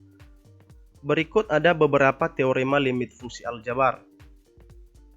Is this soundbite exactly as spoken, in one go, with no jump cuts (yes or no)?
no